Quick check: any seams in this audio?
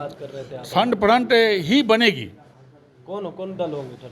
no; 0 cuts

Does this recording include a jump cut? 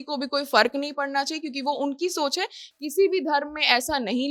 no; 0 cuts

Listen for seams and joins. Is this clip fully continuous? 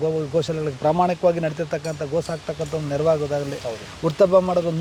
yes; 0 cuts

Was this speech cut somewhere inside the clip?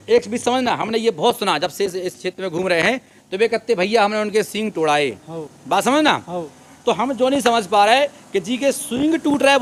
no; 0 cuts

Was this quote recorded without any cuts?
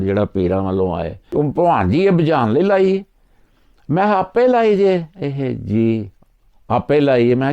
no; 1 cut; at 1.2 s

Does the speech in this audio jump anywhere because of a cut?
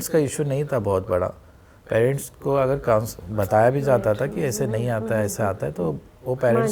no; 0 cuts

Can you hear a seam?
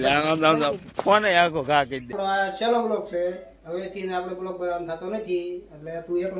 yes; 1 cut; at 2.1 s

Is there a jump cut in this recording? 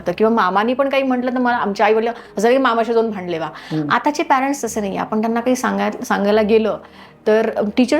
no; 0 cuts

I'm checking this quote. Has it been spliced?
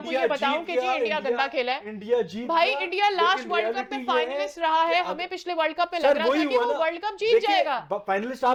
no; 0 cuts

